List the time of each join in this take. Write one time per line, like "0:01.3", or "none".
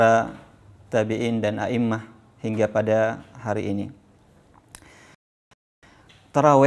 0:05.8